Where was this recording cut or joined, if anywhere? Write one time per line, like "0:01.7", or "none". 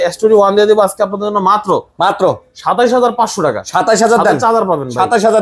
none